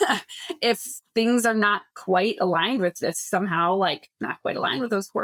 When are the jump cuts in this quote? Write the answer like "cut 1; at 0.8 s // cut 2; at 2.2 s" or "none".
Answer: none